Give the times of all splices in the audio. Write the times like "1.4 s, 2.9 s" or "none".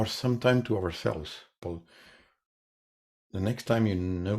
1.6 s